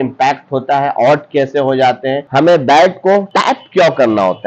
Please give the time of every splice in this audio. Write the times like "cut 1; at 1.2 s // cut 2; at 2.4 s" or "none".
cut 1; at 2.3 s

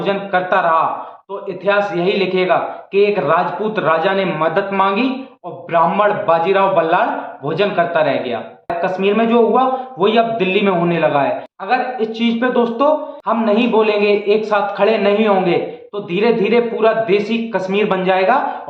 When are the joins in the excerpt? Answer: cut 1; at 8.8 s // cut 2; at 13.1 s

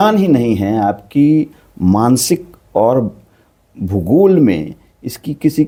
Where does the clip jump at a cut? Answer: none

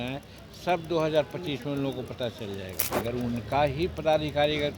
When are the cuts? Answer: cut 1; at 2.8 s

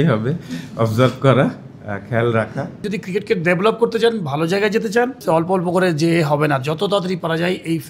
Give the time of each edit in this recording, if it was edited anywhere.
cut 1; at 2.8 s // cut 2; at 5.2 s

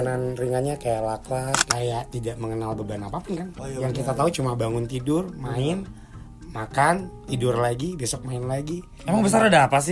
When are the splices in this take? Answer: cut 1; at 1.6 s

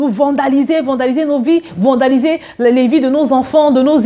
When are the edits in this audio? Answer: none

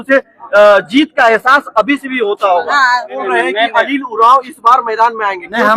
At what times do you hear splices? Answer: cut 1; at 3.2 s

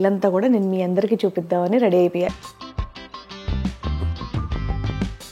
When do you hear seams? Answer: cut 1; at 2.3 s

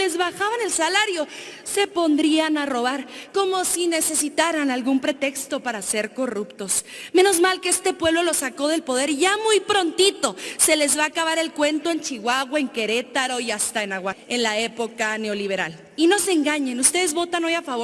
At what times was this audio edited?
cut 1; at 14.2 s

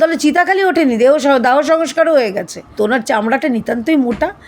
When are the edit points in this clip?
cut 1; at 2.7 s

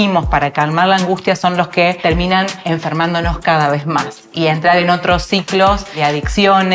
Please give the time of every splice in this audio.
cut 1; at 2.4 s // cut 2; at 5.9 s

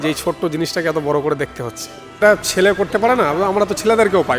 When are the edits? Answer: cut 1; at 2.2 s

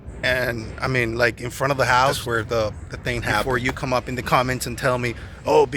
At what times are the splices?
cut 1; at 2.2 s // cut 2; at 3.4 s

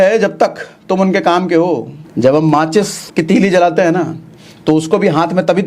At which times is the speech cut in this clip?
cut 1; at 2.0 s // cut 2; at 3.0 s

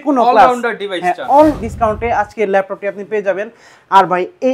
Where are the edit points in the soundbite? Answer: cut 1; at 1.6 s

